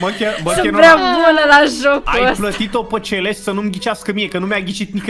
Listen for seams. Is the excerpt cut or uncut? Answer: uncut